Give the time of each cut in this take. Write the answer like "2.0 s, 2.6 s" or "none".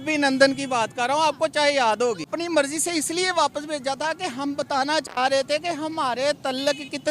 2.3 s

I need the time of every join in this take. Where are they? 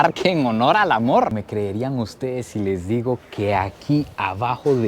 1.4 s

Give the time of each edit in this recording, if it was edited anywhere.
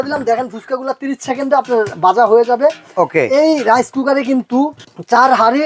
none

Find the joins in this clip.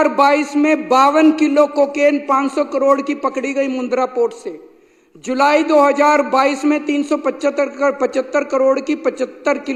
none

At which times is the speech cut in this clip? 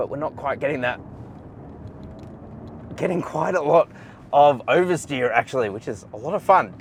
none

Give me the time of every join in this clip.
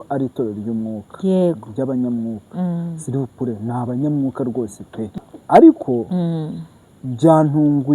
5.1 s

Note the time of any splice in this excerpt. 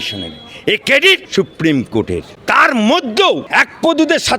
1.3 s, 2.3 s, 3.4 s

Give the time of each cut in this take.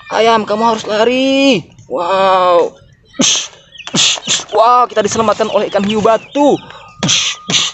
none

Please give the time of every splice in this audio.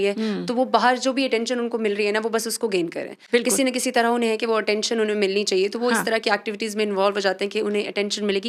none

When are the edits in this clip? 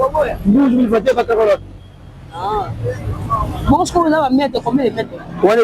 none

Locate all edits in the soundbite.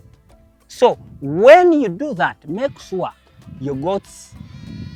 none

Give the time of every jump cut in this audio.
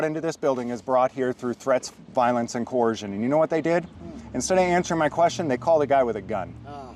none

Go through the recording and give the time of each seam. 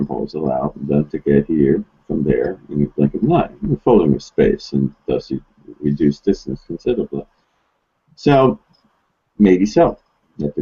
none

